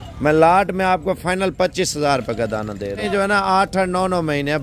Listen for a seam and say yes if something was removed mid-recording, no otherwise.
yes